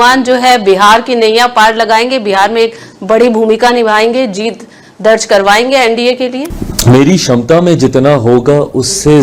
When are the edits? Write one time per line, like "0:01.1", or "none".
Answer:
none